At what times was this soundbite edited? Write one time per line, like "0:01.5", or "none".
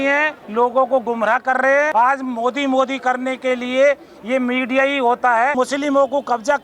0:01.9
0:05.5